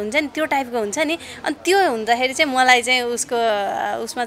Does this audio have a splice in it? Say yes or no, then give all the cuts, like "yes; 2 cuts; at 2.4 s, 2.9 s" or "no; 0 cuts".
no; 0 cuts